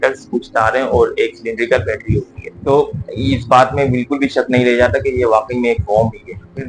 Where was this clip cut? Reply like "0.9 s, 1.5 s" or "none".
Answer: none